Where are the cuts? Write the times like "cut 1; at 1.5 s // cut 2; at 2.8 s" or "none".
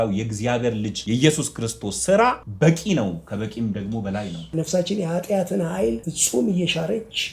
cut 1; at 1.0 s // cut 2; at 2.5 s // cut 3; at 4.5 s // cut 4; at 6.1 s